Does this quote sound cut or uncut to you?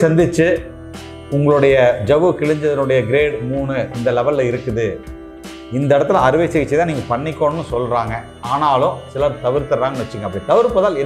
uncut